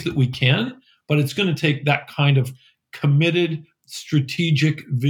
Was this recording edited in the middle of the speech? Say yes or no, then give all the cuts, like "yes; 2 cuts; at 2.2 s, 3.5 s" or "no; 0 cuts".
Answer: no; 0 cuts